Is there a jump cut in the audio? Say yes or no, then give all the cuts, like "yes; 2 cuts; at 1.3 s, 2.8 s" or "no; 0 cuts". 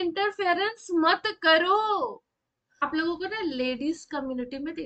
yes; 1 cut; at 2.9 s